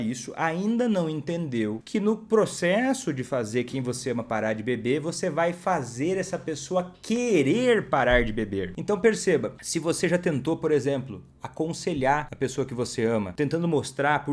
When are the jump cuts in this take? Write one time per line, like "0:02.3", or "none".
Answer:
0:01.8
0:08.7
0:09.6
0:12.3
0:13.3